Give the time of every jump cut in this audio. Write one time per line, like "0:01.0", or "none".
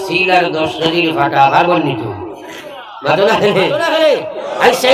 0:04.0